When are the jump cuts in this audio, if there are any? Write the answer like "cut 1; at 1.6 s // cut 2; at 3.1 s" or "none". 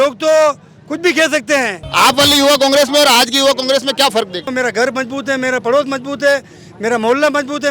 cut 1; at 1.8 s // cut 2; at 4.5 s

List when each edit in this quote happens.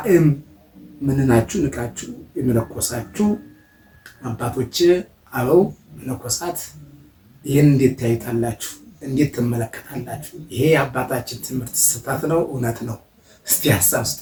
none

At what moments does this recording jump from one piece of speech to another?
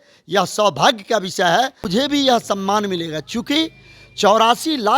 cut 1; at 1.8 s

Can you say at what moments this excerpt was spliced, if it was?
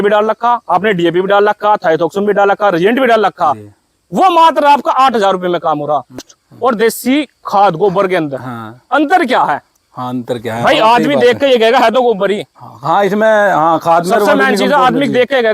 cut 1; at 6.4 s

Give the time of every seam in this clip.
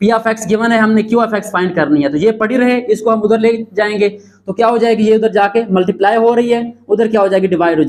none

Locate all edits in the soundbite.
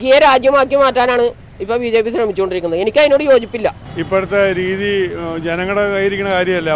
cut 1; at 3.9 s

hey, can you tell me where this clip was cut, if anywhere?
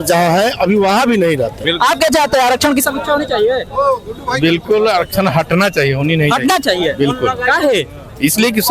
cut 1; at 1.6 s

